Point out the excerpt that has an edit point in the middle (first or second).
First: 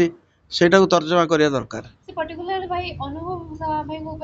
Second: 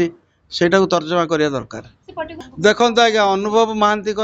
second